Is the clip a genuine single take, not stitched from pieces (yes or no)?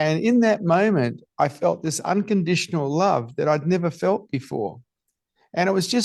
yes